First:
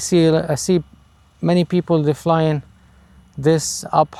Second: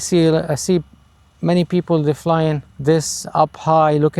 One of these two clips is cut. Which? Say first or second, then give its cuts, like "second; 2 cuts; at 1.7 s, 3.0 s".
second; 1 cut; at 2.7 s